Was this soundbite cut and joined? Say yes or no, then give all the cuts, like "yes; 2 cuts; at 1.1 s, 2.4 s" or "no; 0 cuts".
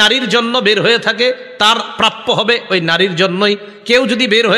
no; 0 cuts